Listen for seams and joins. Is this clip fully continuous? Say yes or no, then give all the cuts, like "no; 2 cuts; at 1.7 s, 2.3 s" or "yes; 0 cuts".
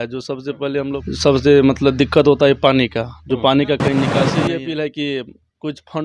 no; 2 cuts; at 1.0 s, 4.3 s